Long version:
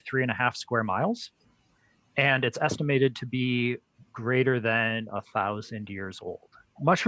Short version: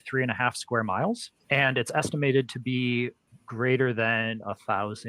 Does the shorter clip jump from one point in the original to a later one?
yes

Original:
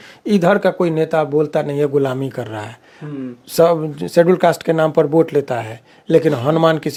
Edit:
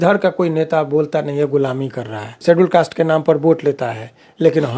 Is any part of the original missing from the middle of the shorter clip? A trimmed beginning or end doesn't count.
yes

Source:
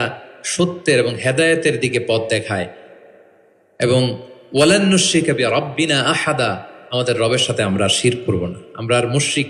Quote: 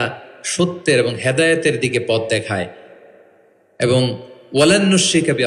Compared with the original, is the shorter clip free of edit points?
yes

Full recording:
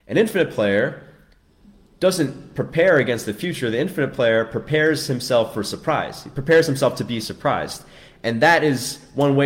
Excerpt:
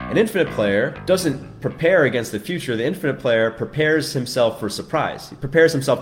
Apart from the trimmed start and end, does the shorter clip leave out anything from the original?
yes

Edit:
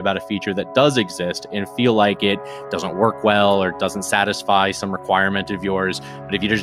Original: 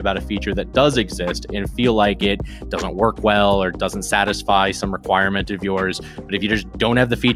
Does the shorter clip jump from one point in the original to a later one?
no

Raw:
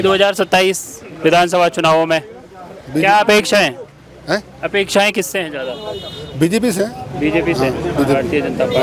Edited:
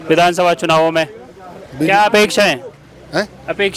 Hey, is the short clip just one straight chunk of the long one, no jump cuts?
yes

